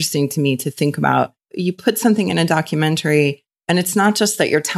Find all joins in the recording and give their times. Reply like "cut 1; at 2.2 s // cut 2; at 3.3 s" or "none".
cut 1; at 3.5 s